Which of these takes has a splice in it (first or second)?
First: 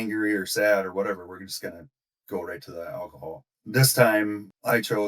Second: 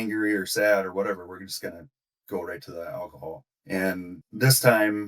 first